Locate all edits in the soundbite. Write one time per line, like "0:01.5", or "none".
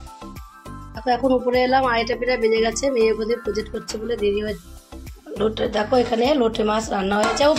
0:00.9
0:04.7

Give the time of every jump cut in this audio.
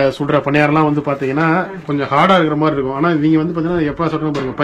none

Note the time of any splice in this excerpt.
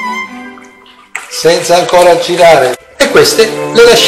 0:02.8

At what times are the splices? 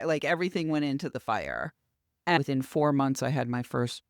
0:02.4

